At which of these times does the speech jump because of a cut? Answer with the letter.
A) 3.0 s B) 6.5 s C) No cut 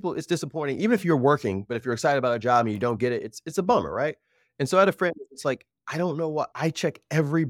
B